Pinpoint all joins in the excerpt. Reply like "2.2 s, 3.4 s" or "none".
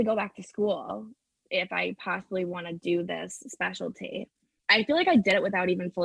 4.6 s